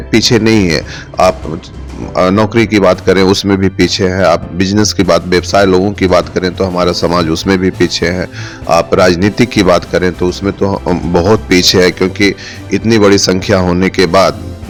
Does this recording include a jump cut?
no; 0 cuts

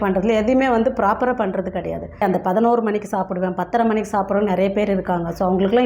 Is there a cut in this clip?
yes; 1 cut; at 2.2 s

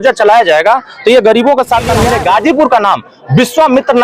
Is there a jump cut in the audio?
yes; 1 cut; at 2.0 s

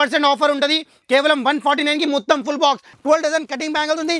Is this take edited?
yes; 1 cut; at 2.9 s

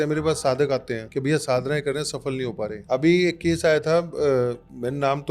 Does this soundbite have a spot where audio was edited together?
yes; 2 cuts; at 1.0 s, 2.8 s

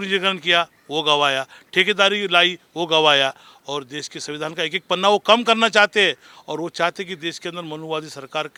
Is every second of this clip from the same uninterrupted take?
yes; 0 cuts

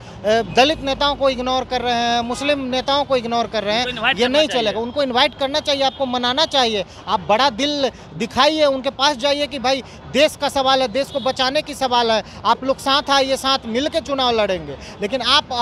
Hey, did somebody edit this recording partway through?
no; 0 cuts

